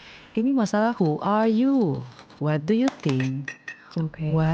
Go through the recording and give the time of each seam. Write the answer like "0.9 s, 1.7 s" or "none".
none